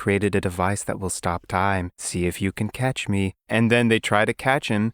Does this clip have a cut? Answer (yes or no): no